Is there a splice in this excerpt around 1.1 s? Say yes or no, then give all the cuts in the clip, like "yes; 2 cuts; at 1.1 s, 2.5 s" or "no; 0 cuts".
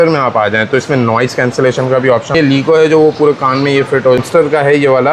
no; 2 cuts; at 2.3 s, 4.2 s